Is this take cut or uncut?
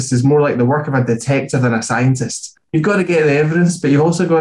uncut